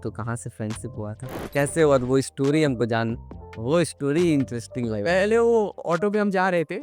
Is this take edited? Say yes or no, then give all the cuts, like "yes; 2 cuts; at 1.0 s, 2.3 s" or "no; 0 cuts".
yes; 1 cut; at 1.4 s